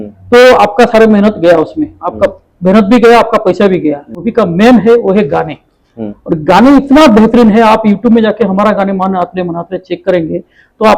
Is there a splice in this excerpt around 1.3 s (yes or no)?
no